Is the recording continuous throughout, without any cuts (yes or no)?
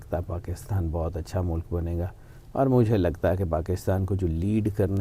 yes